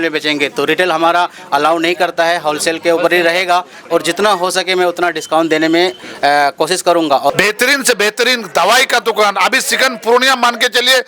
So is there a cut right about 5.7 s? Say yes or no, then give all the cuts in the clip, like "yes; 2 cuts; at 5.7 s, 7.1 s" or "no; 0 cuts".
no; 1 cut; at 7.3 s